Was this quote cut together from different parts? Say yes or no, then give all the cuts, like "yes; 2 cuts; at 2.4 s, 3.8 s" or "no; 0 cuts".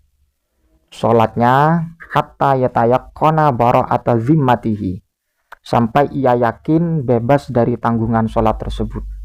no; 0 cuts